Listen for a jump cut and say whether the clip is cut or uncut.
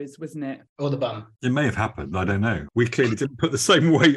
cut